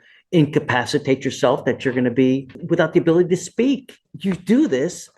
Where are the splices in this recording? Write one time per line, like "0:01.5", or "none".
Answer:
0:02.5
0:04.0